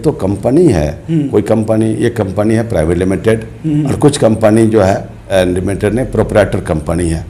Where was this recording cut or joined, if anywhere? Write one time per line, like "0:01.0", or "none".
0:05.2